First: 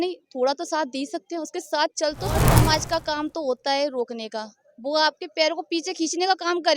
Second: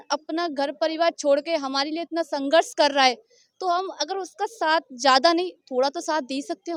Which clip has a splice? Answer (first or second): first